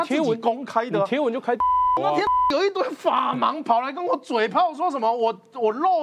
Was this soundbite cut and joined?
no; 0 cuts

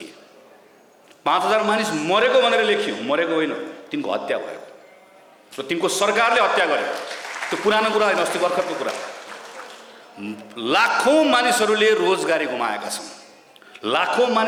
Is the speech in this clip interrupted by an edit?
no; 0 cuts

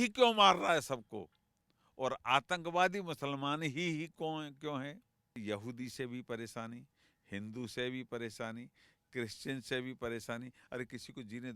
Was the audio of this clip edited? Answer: yes; 1 cut; at 5.3 s

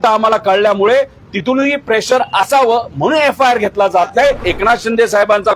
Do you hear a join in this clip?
yes; 1 cut; at 4.4 s

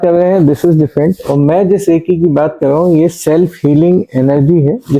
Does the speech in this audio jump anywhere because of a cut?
no; 0 cuts

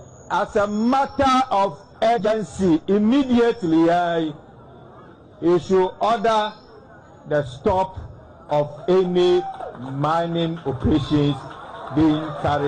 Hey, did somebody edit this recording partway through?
yes; 1 cut; at 2.3 s

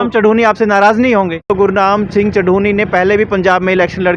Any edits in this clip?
yes; 1 cut; at 1.5 s

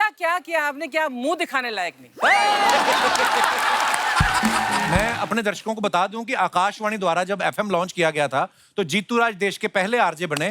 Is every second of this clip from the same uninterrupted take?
no; 1 cut; at 4.9 s

